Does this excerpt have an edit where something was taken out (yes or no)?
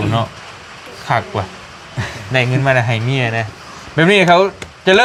no